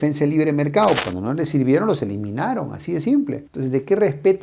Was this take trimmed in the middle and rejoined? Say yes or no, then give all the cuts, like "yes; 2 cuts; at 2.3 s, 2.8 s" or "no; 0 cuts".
yes; 1 cut; at 1.0 s